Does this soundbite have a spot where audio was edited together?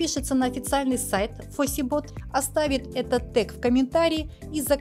yes; 1 cut; at 2.2 s

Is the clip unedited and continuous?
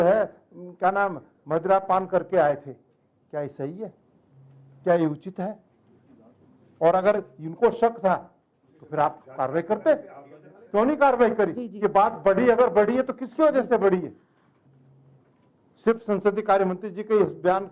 yes; 0 cuts

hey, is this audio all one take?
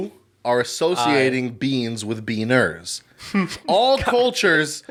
yes; 0 cuts

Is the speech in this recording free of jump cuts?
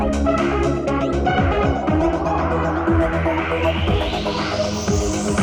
yes; 0 cuts

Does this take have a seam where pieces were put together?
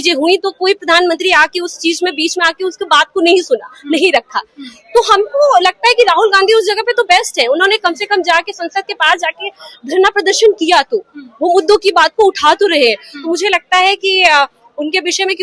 no; 0 cuts

